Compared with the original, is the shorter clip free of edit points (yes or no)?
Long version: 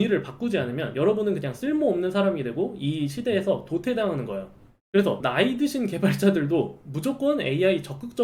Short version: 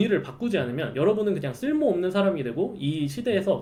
yes